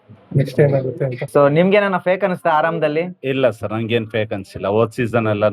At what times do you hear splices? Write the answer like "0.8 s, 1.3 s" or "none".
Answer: 1.2 s